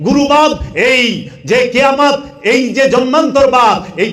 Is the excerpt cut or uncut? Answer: uncut